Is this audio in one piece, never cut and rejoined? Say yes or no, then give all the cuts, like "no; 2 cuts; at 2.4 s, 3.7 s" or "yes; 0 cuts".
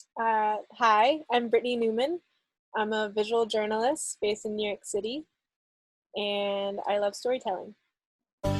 yes; 0 cuts